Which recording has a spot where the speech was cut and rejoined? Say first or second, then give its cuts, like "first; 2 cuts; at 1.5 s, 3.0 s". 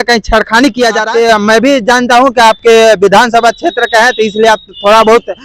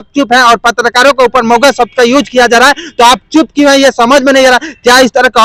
first; 1 cut; at 1.0 s